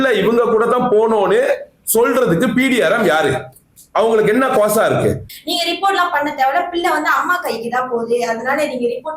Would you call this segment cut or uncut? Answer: cut